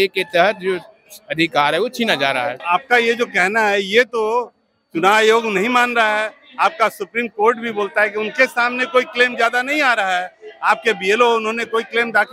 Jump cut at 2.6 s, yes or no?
yes